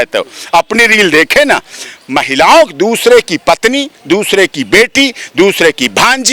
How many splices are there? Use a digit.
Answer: 0